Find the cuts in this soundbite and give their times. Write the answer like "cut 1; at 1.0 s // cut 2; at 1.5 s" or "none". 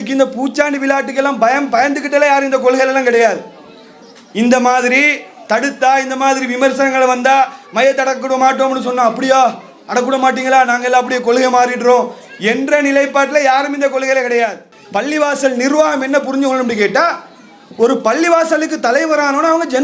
cut 1; at 14.7 s